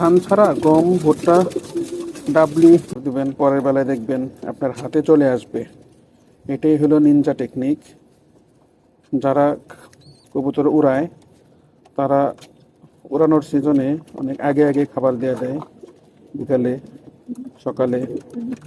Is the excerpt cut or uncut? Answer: cut